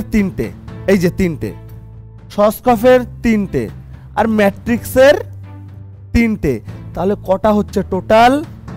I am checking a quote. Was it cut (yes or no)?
no